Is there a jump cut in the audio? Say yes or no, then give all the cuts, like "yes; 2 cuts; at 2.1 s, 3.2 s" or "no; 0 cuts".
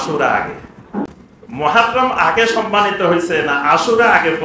yes; 1 cut; at 1.1 s